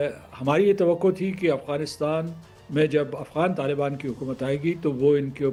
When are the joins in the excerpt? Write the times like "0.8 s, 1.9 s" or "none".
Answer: none